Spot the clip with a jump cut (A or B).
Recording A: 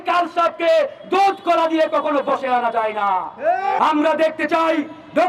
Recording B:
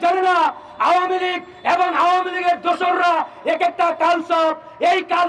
A